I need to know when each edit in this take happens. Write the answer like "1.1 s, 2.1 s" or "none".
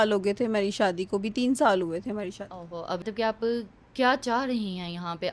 3.0 s